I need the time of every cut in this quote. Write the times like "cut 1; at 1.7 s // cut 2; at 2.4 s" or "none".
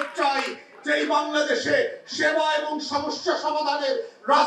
none